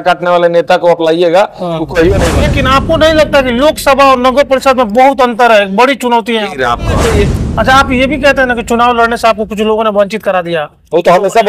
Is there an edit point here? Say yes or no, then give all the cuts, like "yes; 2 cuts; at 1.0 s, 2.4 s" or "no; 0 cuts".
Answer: yes; 2 cuts; at 2.4 s, 7.1 s